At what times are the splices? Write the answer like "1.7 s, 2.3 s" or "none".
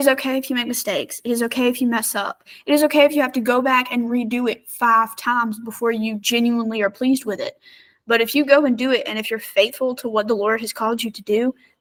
none

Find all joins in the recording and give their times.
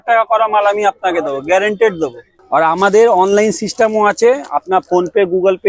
2.3 s

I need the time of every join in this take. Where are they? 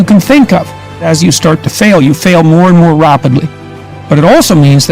0.9 s

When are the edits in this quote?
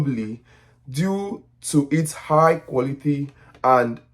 none

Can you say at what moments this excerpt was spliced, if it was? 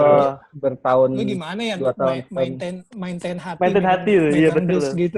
none

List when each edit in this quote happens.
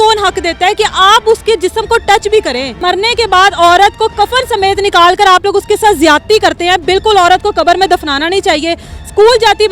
2.7 s

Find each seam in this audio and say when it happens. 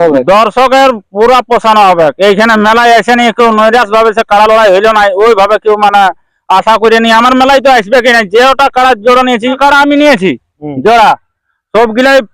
9.6 s

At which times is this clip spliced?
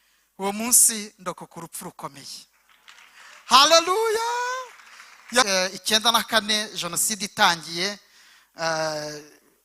5.5 s

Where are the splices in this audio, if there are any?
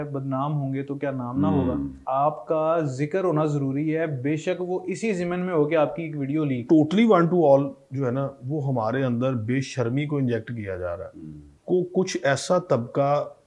2.0 s, 6.6 s, 11.5 s

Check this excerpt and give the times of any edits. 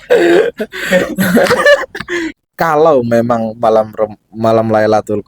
2.4 s

